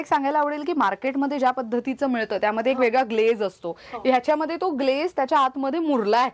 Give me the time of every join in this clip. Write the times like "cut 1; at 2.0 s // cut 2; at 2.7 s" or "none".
none